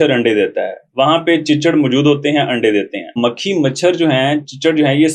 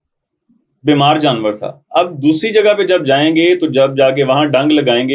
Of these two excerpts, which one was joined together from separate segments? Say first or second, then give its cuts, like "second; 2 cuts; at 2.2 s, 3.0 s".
first; 1 cut; at 3.2 s